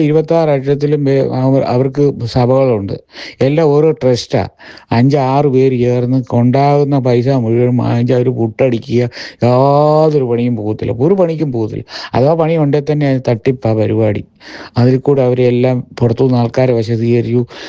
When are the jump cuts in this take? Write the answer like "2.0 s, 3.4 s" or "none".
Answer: none